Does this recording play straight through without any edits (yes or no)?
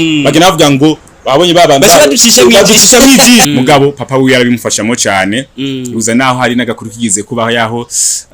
no